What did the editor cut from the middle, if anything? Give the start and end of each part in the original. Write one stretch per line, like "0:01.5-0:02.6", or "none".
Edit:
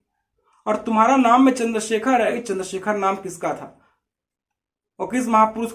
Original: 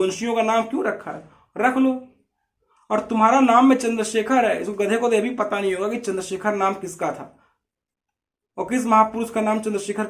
0:04.6-0:06.0